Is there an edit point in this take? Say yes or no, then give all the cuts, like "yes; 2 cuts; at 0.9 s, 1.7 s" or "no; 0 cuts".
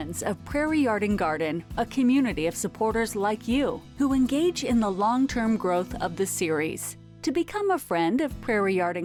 no; 0 cuts